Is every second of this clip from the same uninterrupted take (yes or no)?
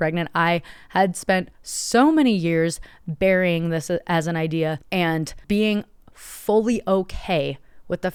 yes